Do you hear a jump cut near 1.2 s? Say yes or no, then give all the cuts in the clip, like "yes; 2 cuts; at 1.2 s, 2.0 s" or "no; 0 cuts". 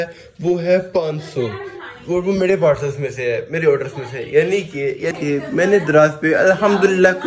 no; 1 cut; at 5.1 s